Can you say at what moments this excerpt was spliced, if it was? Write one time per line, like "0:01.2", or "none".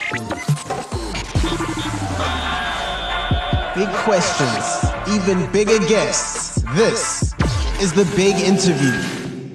none